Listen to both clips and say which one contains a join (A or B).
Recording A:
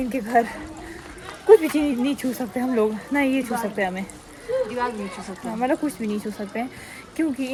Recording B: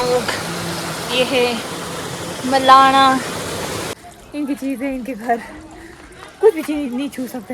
B